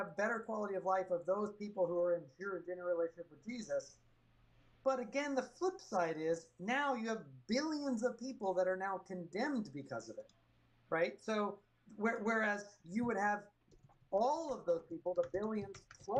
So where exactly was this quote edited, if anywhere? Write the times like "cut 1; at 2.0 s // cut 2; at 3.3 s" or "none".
none